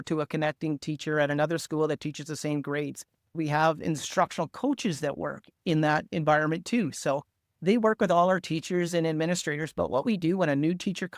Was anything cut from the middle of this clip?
yes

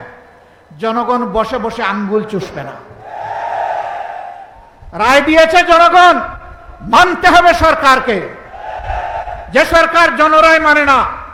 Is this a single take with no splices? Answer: yes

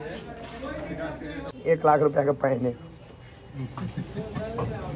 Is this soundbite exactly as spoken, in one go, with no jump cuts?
no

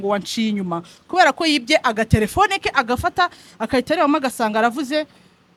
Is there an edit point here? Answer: no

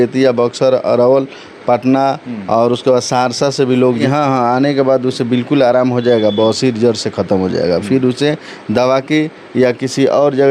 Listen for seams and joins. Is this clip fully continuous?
no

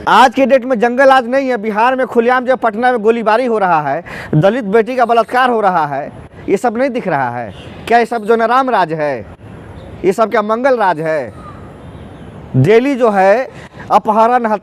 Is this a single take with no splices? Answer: yes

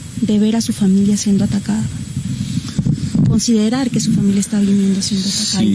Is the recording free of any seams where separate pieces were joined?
yes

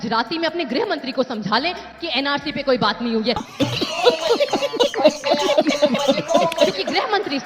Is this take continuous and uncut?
yes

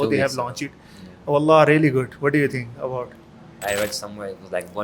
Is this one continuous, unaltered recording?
no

